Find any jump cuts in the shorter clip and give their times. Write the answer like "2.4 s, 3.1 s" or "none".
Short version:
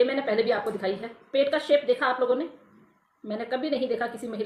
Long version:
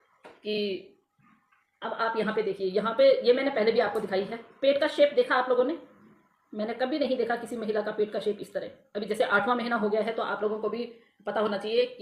none